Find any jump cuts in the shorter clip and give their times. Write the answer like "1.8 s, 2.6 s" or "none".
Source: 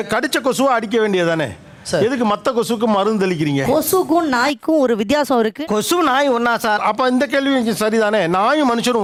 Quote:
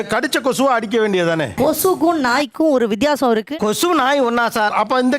1.5 s